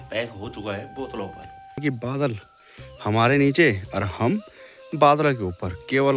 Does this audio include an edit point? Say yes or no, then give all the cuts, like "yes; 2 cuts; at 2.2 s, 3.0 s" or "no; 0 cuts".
yes; 1 cut; at 1.8 s